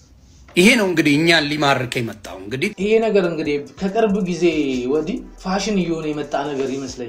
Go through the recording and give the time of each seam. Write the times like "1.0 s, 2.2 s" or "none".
2.7 s